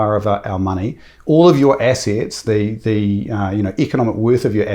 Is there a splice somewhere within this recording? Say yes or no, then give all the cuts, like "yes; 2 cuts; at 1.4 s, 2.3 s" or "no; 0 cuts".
no; 0 cuts